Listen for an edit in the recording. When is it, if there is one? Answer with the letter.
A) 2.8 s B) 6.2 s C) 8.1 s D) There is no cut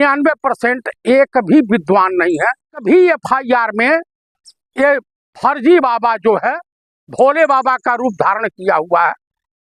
A